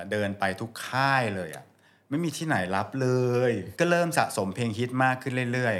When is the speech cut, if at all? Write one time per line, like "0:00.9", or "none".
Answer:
0:03.8